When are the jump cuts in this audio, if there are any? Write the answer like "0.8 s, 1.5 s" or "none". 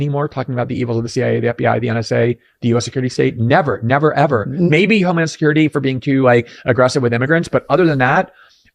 none